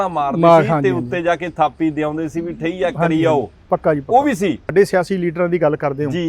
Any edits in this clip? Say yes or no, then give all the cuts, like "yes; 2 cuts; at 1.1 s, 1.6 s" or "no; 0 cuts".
yes; 1 cut; at 4.7 s